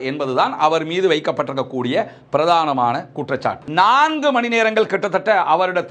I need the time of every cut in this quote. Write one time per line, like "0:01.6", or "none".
0:03.5